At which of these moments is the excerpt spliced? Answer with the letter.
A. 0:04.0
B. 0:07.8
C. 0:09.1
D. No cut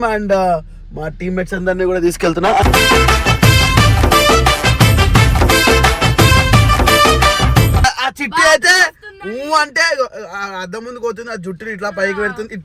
B